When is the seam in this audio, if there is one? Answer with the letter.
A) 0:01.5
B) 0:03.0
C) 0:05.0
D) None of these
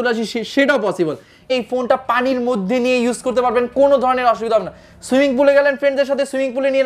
A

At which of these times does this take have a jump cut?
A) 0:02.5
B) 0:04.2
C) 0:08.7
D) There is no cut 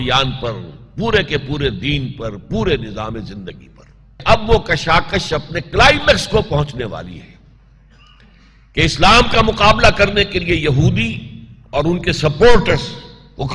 B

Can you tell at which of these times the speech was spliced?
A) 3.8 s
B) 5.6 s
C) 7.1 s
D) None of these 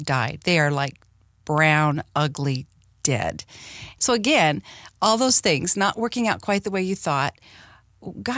A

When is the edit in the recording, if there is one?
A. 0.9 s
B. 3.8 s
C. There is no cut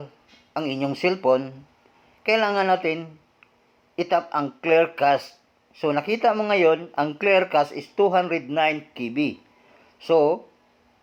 C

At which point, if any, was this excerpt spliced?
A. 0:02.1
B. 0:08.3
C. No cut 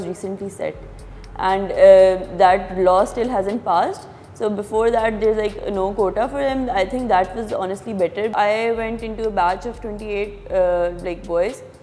B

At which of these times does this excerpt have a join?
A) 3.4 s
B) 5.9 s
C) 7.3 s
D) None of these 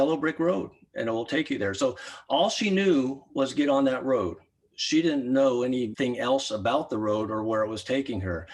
B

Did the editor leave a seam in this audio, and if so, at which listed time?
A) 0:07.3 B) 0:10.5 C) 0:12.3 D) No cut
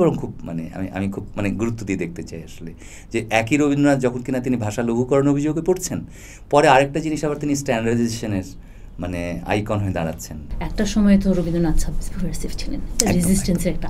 B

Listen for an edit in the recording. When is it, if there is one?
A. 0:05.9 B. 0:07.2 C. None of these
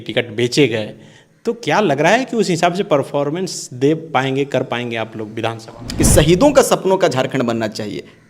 A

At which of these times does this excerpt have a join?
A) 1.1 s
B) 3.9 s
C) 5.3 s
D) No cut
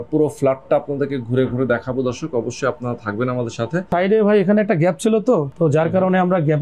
B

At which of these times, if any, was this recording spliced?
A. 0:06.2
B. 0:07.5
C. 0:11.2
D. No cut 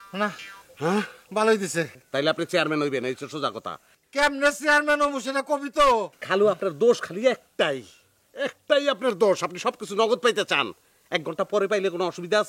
A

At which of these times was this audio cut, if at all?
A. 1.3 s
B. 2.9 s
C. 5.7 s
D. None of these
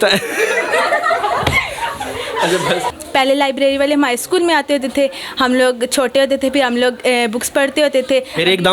B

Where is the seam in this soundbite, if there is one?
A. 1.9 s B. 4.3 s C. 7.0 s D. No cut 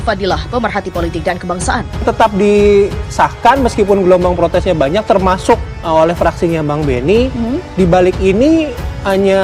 A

